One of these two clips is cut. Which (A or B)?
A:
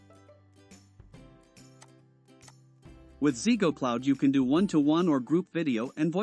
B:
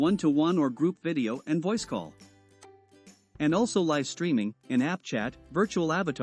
A